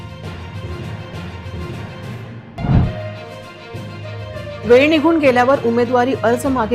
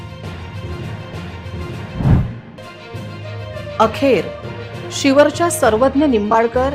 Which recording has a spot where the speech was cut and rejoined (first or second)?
second